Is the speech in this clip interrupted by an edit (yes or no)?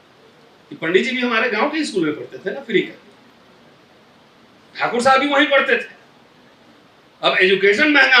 no